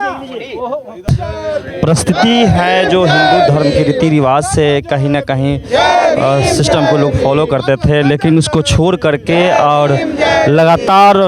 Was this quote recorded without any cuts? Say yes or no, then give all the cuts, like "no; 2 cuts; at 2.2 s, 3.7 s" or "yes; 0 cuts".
no; 1 cut; at 1.1 s